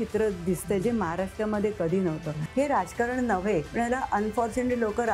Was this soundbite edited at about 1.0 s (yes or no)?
no